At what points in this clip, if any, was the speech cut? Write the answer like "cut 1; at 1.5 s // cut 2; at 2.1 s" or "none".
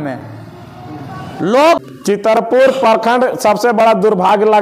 cut 1; at 1.8 s